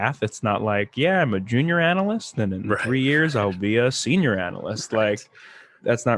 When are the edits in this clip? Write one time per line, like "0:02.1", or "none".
none